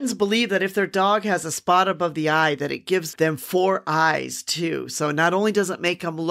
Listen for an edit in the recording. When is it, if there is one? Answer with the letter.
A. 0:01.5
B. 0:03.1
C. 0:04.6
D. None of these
B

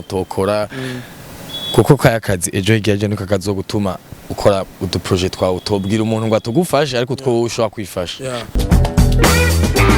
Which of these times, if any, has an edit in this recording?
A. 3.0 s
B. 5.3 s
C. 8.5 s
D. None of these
C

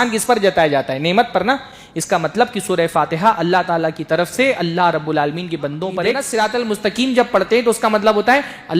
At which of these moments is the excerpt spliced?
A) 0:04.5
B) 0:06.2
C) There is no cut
B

